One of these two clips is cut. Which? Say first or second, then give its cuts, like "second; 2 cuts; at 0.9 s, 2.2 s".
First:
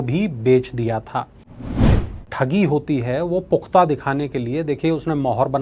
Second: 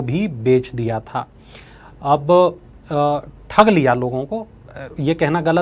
first; 1 cut; at 2.0 s